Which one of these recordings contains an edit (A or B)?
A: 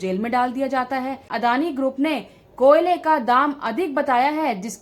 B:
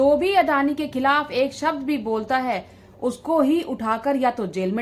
A